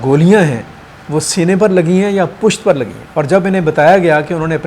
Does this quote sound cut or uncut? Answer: cut